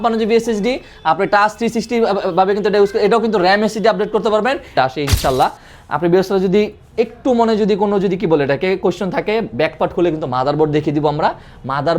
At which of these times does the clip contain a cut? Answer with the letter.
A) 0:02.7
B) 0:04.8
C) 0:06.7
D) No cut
B